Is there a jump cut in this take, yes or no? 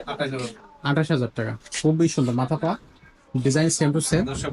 no